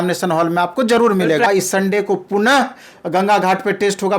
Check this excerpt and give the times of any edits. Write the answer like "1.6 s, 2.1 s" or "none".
1.5 s